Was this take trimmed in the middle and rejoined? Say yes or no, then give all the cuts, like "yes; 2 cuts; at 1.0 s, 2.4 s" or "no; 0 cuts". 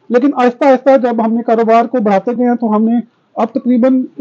no; 0 cuts